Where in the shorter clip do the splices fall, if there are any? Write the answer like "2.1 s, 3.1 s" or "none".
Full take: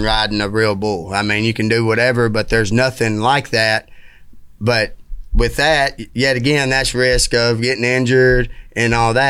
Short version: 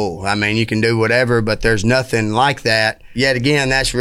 3.0 s

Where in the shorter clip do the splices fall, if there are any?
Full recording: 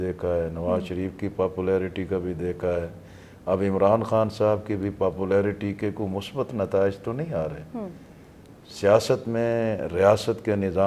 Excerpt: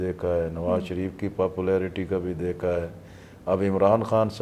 none

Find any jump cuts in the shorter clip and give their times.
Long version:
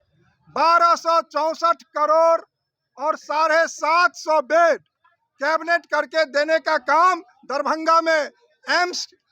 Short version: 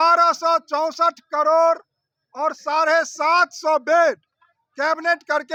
none

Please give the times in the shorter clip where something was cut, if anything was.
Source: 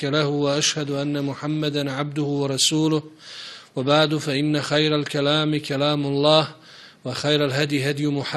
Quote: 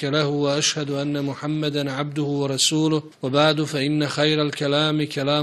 3.1 s

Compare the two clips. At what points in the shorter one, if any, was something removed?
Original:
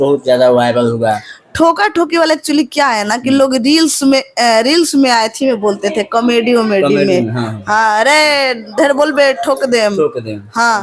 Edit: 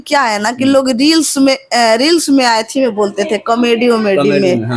none

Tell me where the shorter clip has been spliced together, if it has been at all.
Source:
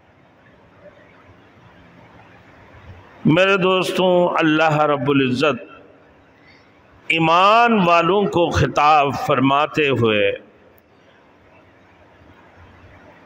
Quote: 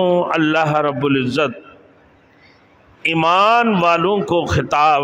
none

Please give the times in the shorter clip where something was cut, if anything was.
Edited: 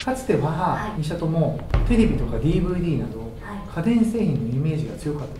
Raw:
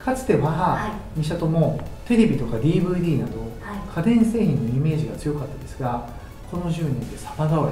1.0 s

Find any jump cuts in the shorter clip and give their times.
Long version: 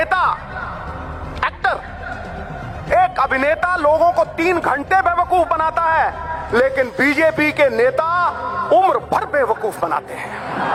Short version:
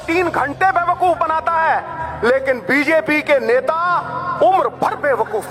none

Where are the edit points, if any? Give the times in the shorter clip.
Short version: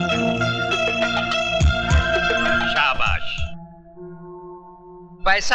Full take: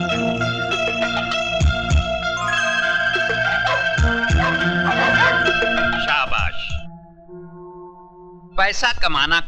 2.2 s

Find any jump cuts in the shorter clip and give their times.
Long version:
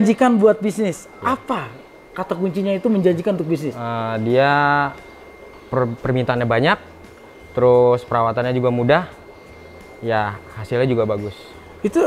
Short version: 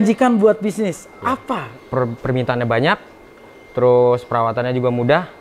1.7 s

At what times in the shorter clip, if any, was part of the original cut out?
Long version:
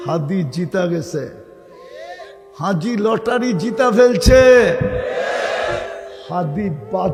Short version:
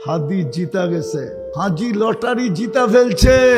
1.4 s

